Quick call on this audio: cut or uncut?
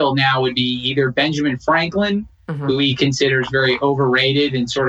uncut